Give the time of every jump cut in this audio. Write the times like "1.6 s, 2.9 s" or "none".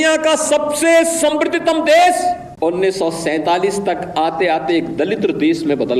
2.5 s